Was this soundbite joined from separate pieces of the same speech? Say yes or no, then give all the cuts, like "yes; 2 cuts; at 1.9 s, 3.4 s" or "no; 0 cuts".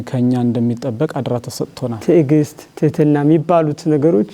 yes; 1 cut; at 1.9 s